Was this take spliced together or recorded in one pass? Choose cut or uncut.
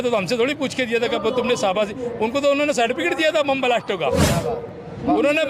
uncut